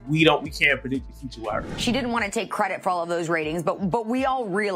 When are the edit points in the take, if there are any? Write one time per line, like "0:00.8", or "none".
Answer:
0:01.6